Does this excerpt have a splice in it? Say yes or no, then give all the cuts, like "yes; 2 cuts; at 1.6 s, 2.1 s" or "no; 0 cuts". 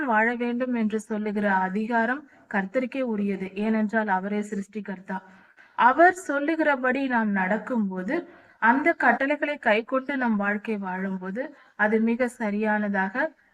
no; 0 cuts